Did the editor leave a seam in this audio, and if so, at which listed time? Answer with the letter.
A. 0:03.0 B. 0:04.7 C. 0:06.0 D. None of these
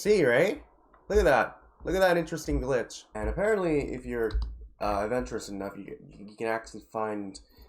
A